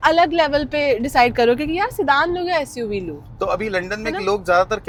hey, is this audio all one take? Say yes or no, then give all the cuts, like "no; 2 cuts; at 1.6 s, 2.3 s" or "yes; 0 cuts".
yes; 0 cuts